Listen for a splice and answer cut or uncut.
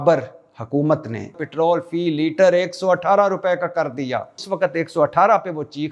cut